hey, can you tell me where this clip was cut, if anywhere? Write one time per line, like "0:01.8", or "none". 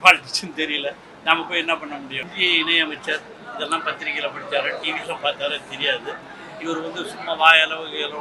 0:02.3